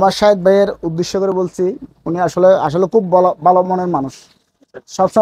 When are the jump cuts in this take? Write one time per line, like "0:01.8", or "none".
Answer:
none